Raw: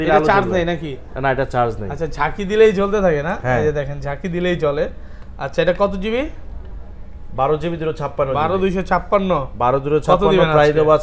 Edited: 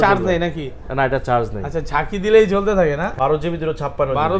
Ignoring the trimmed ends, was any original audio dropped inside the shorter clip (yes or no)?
yes